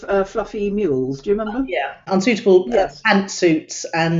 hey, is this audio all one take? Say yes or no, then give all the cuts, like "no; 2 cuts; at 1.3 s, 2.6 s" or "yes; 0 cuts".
no; 1 cut; at 2.0 s